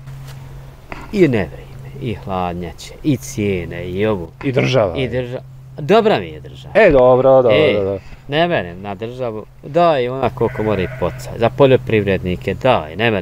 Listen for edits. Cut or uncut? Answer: uncut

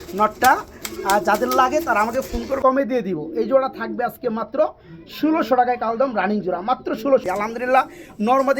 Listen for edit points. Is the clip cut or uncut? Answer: cut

